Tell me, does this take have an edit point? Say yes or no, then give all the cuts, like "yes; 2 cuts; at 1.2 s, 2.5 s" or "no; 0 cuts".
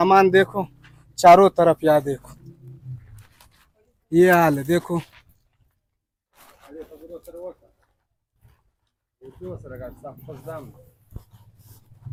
no; 0 cuts